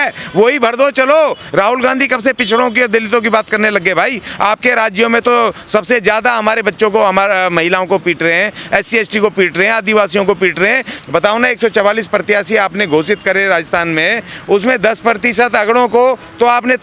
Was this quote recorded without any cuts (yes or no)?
no